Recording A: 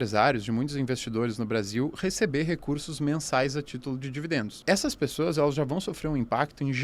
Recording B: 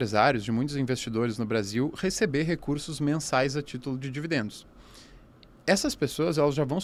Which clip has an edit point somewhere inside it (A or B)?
A